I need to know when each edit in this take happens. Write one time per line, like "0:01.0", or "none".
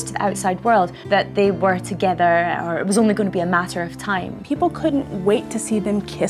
0:01.0
0:04.3

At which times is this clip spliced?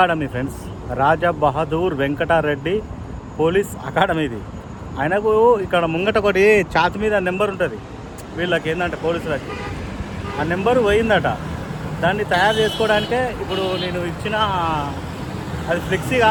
none

